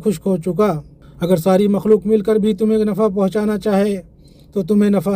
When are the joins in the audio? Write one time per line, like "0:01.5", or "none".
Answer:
none